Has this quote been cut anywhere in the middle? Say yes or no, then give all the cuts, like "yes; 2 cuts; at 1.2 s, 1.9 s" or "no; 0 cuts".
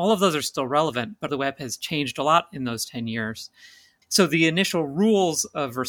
yes; 2 cuts; at 1.3 s, 3.9 s